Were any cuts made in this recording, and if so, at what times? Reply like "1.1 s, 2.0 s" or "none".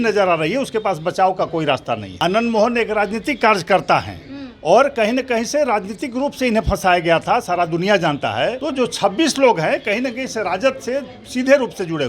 2.1 s, 8.6 s